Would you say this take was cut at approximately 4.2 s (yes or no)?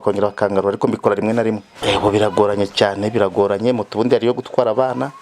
no